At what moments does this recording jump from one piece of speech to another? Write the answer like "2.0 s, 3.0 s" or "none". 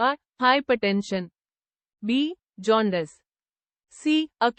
none